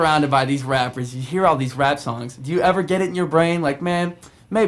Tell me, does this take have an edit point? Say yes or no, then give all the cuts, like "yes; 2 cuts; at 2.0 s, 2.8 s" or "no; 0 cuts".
no; 0 cuts